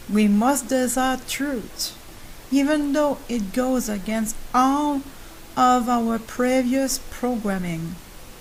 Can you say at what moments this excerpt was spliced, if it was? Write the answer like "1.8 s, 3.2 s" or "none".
none